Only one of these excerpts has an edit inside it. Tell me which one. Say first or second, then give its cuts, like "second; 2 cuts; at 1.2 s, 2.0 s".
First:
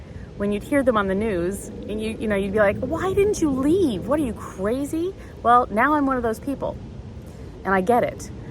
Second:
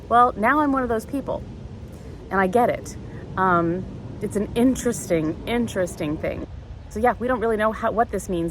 second; 1 cut; at 6.5 s